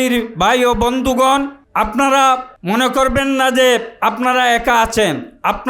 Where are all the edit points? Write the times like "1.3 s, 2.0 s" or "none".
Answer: 1.6 s, 2.5 s